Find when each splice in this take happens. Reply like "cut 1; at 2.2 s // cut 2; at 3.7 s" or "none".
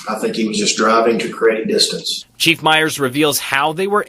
cut 1; at 2.3 s